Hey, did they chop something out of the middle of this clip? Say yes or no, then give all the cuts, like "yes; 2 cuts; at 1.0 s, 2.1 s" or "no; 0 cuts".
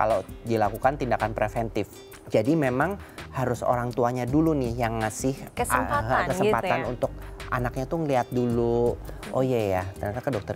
yes; 2 cuts; at 2.0 s, 5.4 s